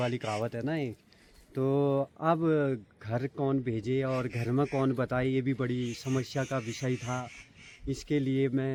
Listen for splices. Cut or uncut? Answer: uncut